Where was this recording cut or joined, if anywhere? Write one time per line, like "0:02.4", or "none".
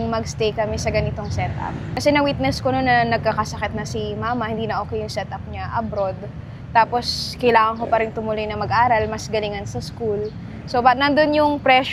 none